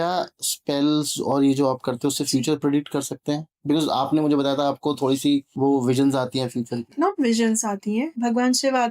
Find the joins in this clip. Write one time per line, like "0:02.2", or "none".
0:05.5
0:06.9
0:08.1